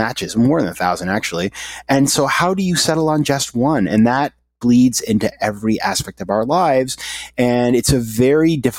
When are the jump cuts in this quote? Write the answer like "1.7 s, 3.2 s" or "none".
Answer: none